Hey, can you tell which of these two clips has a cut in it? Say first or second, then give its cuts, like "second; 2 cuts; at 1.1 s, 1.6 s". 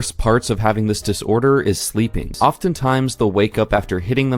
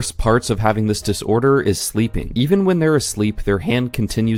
first; 1 cut; at 2.3 s